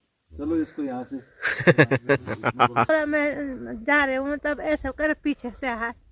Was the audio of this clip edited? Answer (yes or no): yes